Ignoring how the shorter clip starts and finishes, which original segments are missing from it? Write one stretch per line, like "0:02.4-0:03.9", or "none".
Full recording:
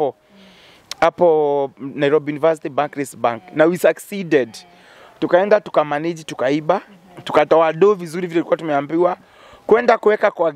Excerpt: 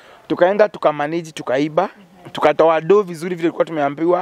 none